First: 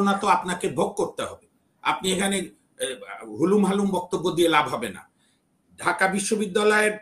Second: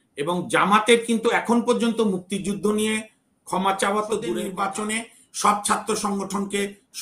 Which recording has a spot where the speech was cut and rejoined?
second; 1 cut; at 4.5 s

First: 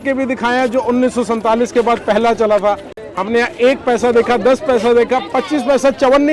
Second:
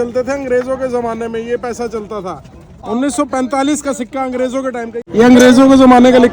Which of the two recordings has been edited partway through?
second; 2 cuts; at 2.7 s, 5.1 s

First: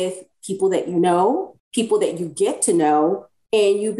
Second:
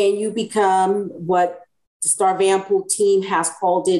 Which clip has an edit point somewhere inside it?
first; 1 cut; at 1.6 s

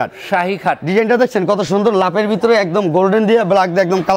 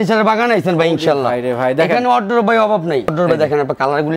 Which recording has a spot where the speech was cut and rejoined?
second; 1 cut; at 3.1 s

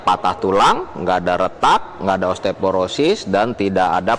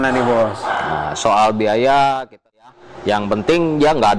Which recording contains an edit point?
second; 1 cut; at 2.7 s

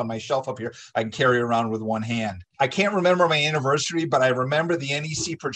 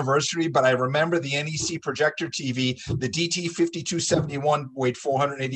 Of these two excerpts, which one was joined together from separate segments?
first; 1 cut; at 2.4 s

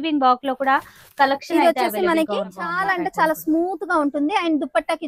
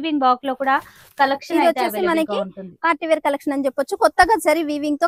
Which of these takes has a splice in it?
first; 1 cut; at 2.7 s

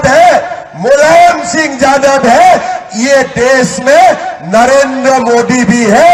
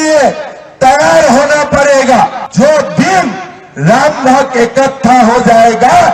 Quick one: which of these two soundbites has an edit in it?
second; 1 cut; at 2.4 s

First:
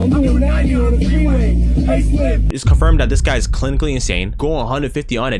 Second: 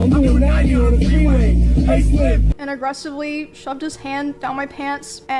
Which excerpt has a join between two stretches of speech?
second; 1 cut; at 2.5 s

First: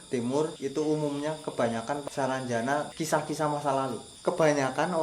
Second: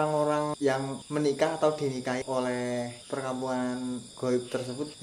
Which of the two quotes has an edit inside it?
first; 1 cut; at 4.1 s

